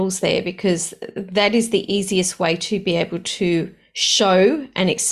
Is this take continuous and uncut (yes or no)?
yes